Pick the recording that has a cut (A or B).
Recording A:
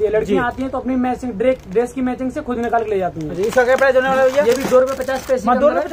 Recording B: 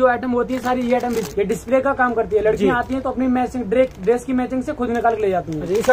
B